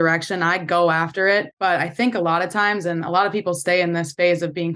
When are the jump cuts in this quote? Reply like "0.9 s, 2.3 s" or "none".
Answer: 1.5 s